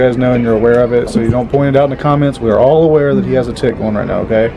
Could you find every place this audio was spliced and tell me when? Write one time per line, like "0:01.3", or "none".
none